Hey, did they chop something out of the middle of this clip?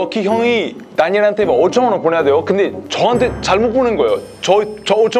no; 0 cuts

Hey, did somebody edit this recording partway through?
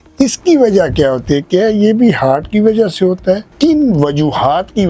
yes; 1 cut; at 3.5 s

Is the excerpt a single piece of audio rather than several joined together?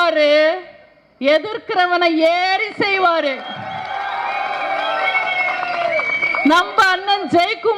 yes; 0 cuts

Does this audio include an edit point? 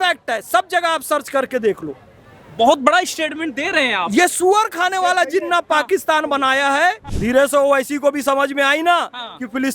yes; 1 cut; at 7.1 s

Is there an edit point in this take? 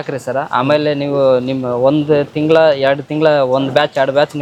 no; 0 cuts

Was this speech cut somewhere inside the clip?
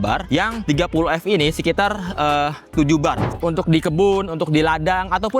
yes; 1 cut; at 3.4 s

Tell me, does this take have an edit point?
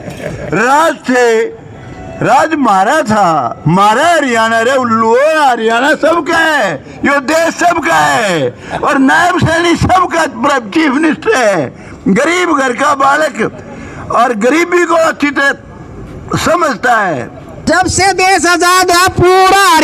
yes; 1 cut; at 17.7 s

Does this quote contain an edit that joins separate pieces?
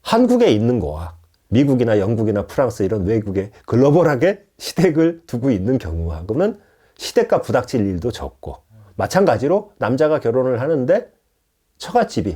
no; 0 cuts

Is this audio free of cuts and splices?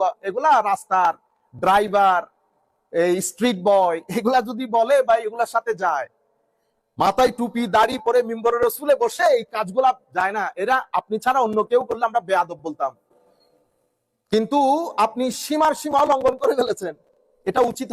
yes; 0 cuts

